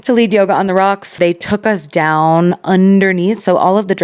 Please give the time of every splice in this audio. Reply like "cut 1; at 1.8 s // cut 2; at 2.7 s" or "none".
cut 1; at 1.2 s